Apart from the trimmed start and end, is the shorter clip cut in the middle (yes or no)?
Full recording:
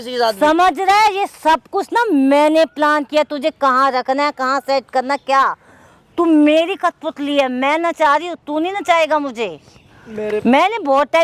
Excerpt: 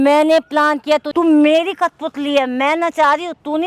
yes